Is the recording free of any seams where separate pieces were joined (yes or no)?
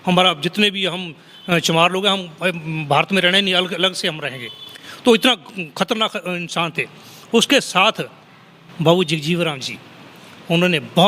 yes